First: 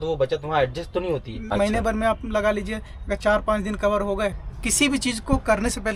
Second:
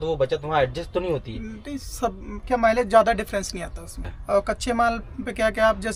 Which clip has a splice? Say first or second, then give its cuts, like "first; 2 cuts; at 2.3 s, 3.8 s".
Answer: first; 2 cuts; at 1.4 s, 4.4 s